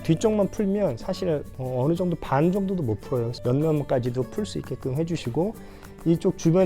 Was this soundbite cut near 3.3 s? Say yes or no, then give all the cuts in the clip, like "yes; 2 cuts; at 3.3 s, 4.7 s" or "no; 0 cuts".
yes; 2 cuts; at 1.6 s, 3.3 s